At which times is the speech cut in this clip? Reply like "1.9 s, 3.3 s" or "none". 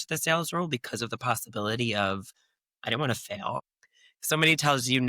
3.6 s